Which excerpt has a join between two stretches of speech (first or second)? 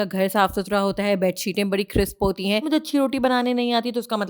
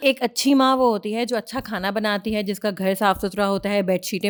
first